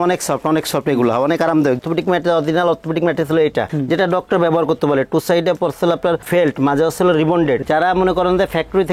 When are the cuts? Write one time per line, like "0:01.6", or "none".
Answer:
0:01.8
0:07.6